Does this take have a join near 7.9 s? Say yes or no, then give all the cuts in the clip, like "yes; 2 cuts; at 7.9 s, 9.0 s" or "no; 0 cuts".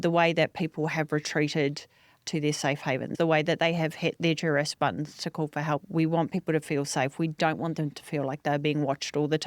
no; 2 cuts; at 3.1 s, 5.9 s